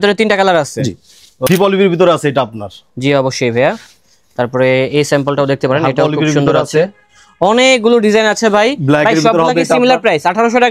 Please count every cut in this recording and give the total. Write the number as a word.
one